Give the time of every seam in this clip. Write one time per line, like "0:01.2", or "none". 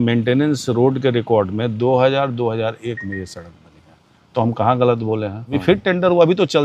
0:05.5